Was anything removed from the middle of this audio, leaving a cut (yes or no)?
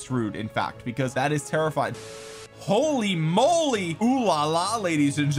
yes